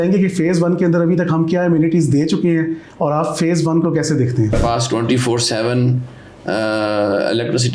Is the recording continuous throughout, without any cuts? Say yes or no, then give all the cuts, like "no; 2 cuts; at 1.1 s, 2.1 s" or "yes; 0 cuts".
no; 1 cut; at 4.5 s